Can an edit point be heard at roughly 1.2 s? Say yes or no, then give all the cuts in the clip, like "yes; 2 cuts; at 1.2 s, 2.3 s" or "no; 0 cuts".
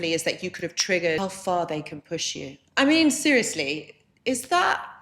yes; 1 cut; at 1.2 s